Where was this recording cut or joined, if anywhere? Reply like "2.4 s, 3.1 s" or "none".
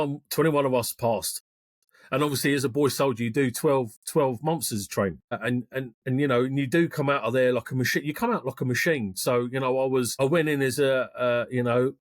5.4 s, 10.1 s